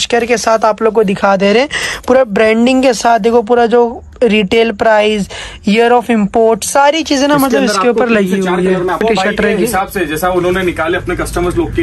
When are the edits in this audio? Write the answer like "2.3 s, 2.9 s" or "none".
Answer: 9.0 s